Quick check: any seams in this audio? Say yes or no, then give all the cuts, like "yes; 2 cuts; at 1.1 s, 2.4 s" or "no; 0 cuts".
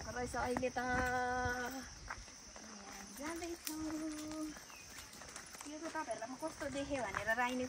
no; 0 cuts